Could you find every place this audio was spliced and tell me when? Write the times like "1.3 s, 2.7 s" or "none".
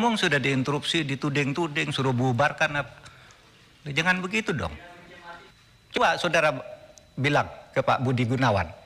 6.0 s